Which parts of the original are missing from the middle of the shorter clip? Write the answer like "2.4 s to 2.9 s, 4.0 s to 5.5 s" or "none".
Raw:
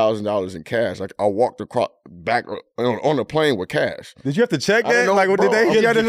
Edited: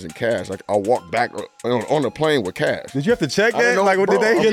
1.6 s to 2.2 s, 4.0 s to 4.2 s